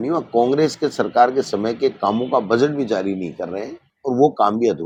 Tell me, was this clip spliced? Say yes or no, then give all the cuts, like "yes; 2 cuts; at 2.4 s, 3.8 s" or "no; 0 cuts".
no; 0 cuts